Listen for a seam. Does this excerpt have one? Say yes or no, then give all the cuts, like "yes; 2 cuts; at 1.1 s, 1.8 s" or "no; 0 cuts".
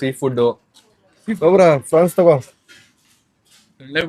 no; 0 cuts